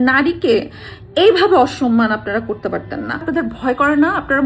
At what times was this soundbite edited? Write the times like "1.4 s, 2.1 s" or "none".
3.3 s